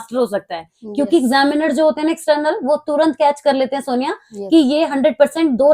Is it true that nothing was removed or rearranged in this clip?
yes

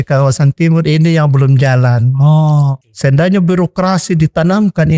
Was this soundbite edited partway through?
yes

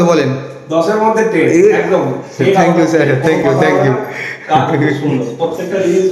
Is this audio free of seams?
yes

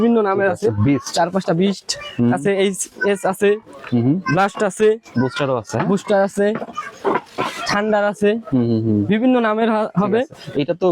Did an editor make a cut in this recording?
no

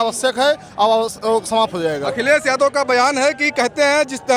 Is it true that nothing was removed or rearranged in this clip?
yes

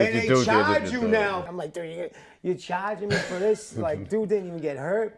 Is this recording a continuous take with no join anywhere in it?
no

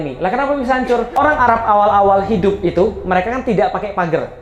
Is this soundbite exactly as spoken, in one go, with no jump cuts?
no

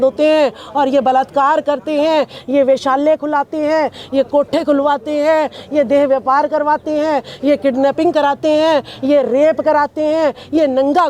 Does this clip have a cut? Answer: no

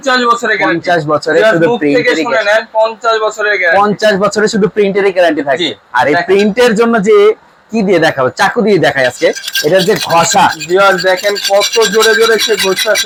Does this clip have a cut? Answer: no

